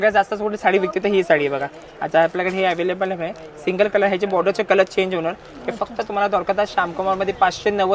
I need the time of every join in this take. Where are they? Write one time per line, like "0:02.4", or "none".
none